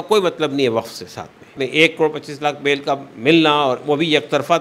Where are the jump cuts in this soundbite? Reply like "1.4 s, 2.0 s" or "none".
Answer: 1.6 s